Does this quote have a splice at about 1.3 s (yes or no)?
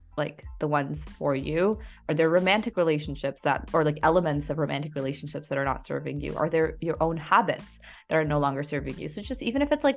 no